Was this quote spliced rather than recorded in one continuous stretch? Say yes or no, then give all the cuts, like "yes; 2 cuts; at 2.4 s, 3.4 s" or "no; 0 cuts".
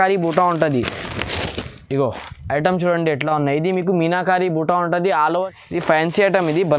yes; 1 cut; at 5.5 s